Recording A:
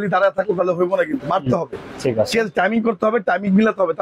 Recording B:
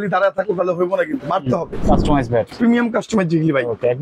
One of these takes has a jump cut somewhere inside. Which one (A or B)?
B